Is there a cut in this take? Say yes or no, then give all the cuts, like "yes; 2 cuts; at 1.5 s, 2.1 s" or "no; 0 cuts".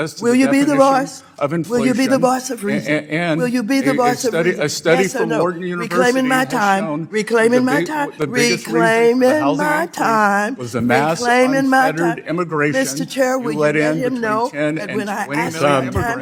no; 0 cuts